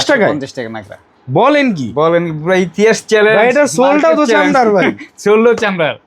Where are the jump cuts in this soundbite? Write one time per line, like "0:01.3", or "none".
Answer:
none